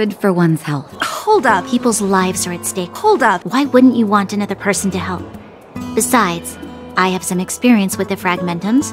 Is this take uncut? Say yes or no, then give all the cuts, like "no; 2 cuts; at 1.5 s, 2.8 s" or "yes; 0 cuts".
no; 1 cut; at 0.9 s